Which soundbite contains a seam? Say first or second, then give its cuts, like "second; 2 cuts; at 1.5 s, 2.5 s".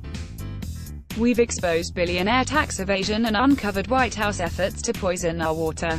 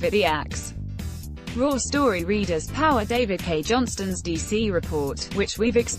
first; 1 cut; at 1.1 s